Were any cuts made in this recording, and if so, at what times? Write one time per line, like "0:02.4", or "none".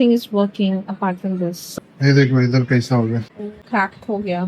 0:01.6